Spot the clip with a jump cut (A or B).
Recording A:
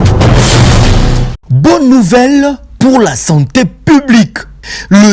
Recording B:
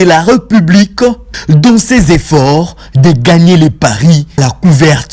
A